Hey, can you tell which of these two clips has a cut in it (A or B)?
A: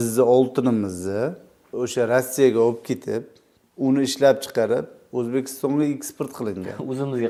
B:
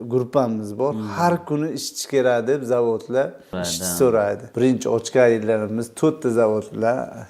B